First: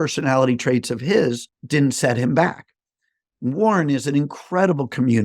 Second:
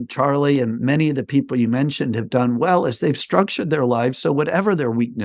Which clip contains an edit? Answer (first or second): first